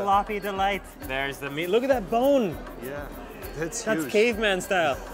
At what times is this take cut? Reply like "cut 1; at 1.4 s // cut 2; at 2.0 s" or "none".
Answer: cut 1; at 1.0 s

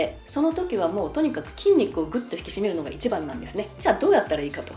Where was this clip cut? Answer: cut 1; at 3.7 s

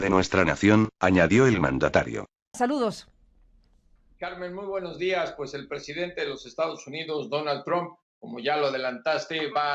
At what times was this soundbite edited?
none

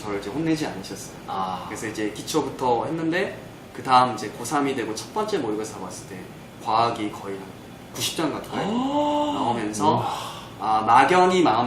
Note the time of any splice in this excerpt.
none

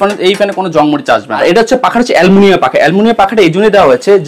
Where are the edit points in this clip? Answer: cut 1; at 1.4 s

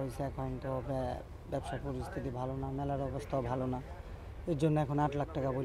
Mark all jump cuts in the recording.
none

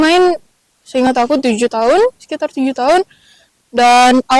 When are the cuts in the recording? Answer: none

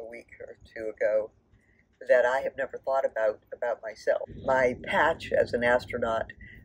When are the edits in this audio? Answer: cut 1; at 4.3 s

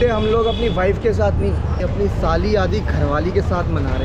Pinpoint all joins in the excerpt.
none

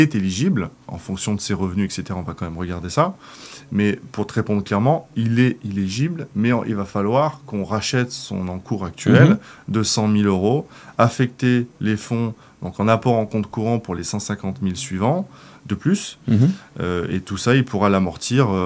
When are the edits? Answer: none

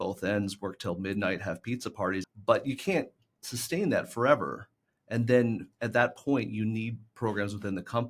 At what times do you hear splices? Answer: cut 1; at 2.2 s

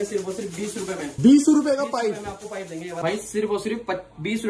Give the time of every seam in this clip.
cut 1; at 3.0 s

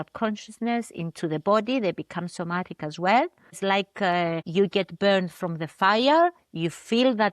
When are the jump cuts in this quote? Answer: cut 1; at 3.6 s // cut 2; at 4.4 s

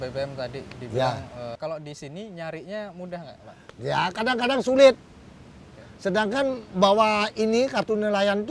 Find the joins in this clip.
cut 1; at 1.6 s

